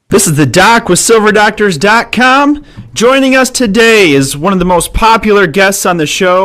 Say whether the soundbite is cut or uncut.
cut